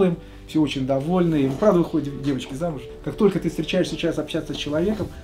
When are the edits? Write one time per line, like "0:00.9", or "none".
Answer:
0:03.0